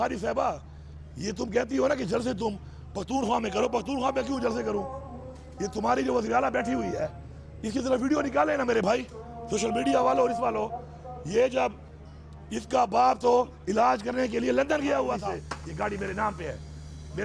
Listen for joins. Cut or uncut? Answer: cut